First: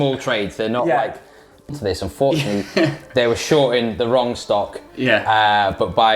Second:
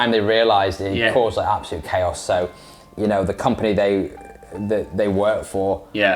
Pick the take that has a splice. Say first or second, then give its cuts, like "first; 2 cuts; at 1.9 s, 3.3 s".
first; 1 cut; at 1.7 s